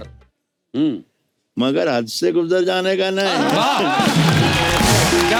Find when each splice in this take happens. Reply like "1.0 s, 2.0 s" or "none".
none